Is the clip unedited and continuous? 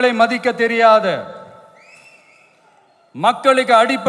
yes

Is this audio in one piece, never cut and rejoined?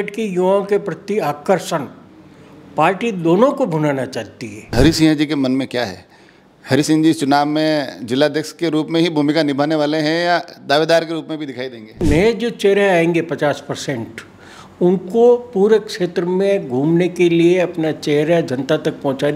no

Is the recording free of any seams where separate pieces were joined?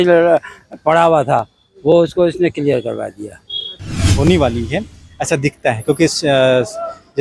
no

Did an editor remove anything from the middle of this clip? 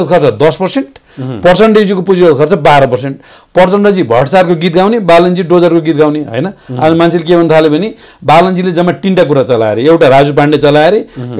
no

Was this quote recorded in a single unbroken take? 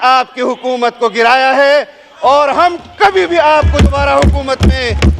yes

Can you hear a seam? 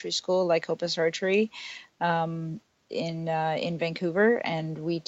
no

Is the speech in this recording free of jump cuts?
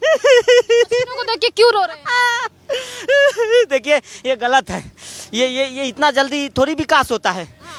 yes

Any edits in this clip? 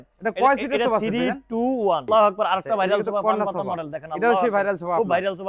yes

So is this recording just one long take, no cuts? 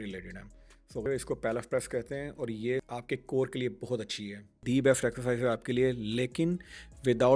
no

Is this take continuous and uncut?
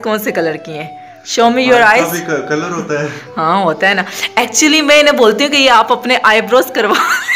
yes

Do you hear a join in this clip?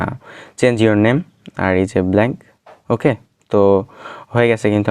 no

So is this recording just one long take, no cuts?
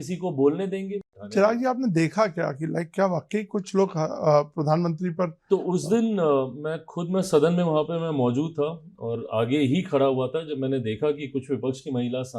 no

